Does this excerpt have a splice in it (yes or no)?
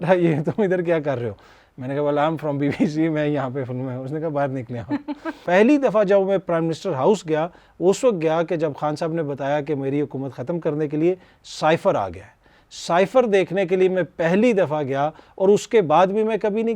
yes